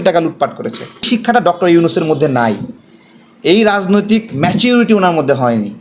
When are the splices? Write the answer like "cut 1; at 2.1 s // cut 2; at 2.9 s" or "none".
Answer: cut 1; at 1.0 s